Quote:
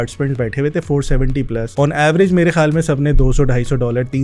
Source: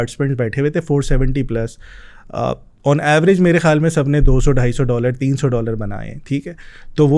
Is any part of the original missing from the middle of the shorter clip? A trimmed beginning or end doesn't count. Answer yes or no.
yes